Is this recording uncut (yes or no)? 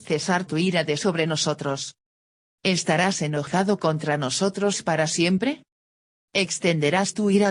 yes